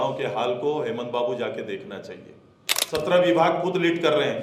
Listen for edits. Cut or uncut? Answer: cut